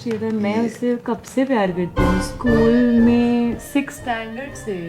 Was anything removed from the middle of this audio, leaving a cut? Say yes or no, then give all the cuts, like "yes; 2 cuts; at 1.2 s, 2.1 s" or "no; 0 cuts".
no; 0 cuts